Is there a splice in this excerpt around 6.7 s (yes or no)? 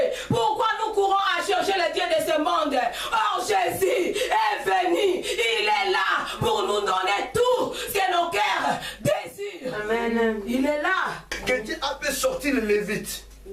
no